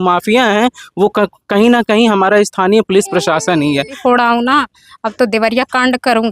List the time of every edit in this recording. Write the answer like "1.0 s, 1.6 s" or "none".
4.0 s